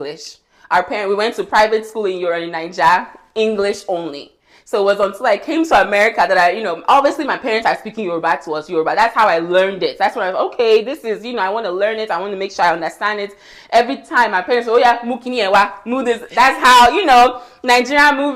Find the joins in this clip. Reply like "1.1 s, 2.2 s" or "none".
none